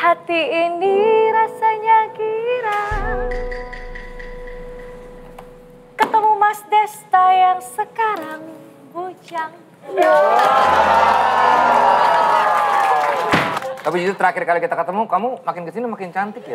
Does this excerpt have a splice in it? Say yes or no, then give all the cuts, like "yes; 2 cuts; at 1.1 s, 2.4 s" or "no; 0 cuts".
yes; 1 cut; at 13.5 s